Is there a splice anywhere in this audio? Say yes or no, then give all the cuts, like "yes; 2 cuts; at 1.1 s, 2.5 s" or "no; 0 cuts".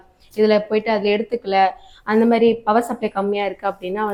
no; 0 cuts